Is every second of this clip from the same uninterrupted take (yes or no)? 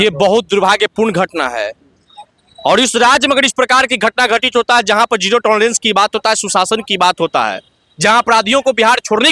yes